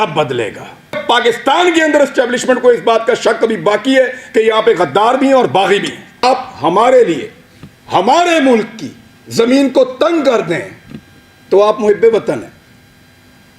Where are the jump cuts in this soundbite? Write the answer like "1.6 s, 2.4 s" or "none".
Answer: 1.0 s, 6.2 s